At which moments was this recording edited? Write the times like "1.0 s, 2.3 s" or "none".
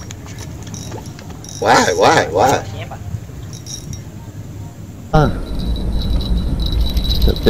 5.1 s